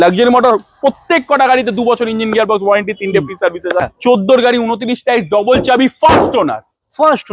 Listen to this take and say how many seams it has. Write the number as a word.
one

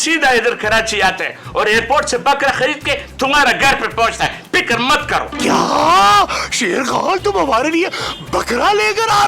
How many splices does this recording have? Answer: zero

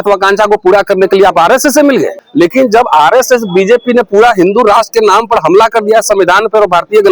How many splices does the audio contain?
one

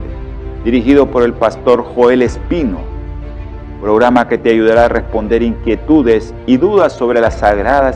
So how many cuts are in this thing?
zero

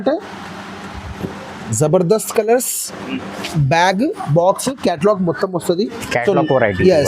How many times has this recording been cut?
one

